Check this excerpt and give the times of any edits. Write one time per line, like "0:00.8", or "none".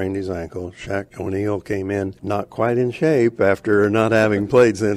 0:01.1
0:02.2